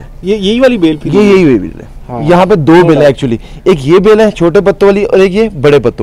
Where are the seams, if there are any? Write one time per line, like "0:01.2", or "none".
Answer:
none

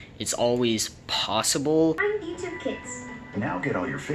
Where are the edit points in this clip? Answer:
0:02.0

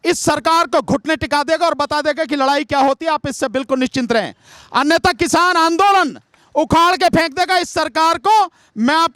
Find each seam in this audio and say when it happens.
none

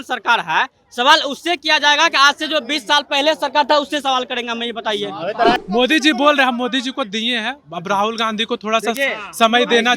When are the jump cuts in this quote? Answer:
0:05.6

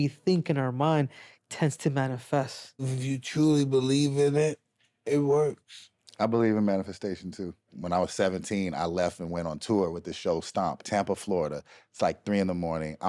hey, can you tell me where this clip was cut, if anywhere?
0:03.0
0:07.8
0:10.8

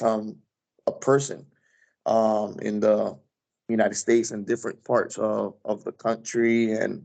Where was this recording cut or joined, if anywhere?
none

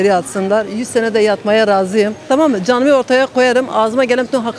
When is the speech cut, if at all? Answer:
0:02.2

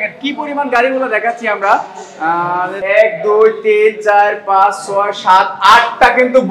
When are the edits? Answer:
0:02.8

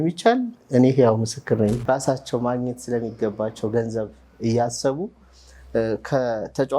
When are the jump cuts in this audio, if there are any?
0:01.8

